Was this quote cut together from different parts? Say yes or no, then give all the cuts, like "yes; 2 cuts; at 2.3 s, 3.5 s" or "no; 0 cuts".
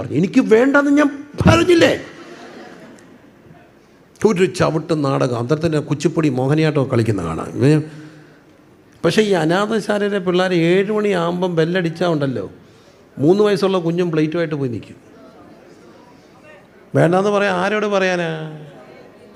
no; 0 cuts